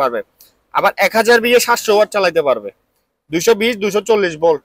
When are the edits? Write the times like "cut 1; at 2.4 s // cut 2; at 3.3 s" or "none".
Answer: none